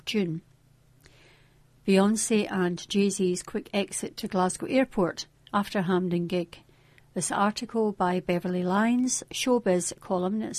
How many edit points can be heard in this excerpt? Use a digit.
0